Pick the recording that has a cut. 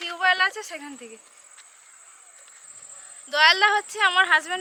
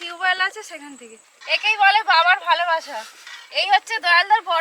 second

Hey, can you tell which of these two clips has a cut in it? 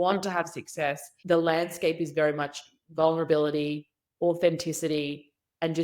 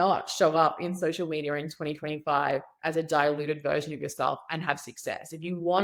first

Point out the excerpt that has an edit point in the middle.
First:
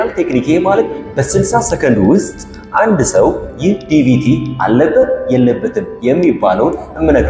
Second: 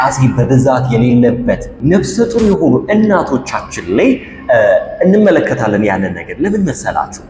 second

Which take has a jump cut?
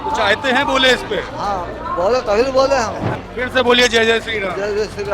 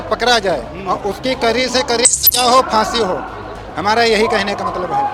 first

